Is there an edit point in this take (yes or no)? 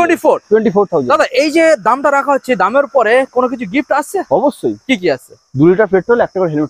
no